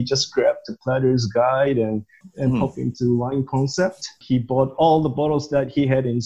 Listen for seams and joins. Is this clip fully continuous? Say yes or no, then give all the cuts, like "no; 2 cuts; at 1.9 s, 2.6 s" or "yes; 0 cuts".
yes; 0 cuts